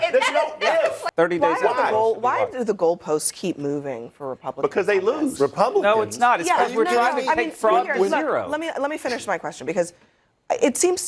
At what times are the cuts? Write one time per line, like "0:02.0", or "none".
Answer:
0:01.0